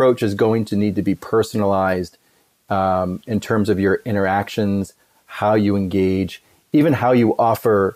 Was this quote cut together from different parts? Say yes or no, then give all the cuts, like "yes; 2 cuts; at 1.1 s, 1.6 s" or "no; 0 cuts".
no; 0 cuts